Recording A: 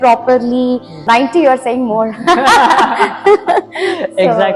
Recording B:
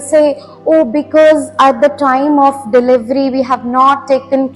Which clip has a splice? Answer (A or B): A